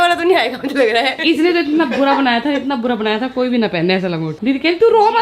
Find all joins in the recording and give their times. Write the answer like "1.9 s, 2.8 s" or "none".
1.2 s, 4.3 s